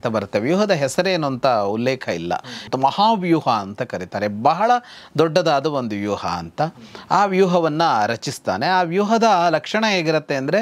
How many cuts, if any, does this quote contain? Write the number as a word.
one